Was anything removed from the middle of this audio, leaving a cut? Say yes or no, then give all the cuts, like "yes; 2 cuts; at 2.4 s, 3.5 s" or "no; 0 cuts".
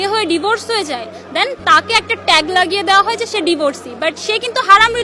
no; 0 cuts